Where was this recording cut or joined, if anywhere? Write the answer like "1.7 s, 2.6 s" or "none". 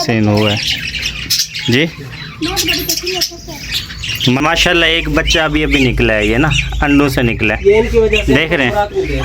4.4 s